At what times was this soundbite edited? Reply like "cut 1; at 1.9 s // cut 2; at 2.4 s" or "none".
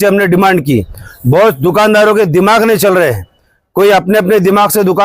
cut 1; at 1.0 s